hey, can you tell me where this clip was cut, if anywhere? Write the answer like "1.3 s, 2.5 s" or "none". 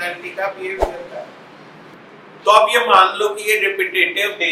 1.9 s